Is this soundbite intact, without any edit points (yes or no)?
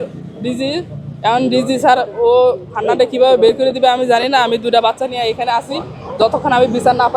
yes